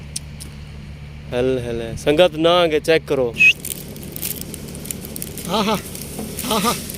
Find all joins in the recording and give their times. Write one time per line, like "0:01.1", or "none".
0:03.5